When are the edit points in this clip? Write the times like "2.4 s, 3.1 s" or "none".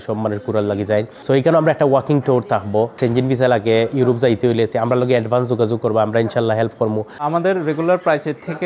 1.1 s, 3.0 s, 7.2 s